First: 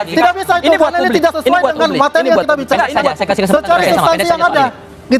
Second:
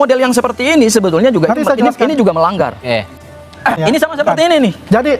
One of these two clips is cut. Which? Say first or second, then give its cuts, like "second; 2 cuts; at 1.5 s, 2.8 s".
second; 1 cut; at 3.8 s